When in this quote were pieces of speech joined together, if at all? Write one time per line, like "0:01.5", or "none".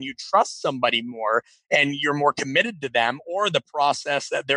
none